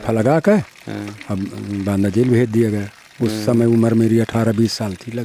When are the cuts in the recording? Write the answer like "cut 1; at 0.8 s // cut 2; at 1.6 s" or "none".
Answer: none